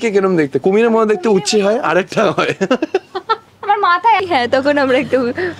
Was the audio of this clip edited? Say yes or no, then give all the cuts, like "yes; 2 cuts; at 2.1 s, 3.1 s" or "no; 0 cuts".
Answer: yes; 1 cut; at 4.2 s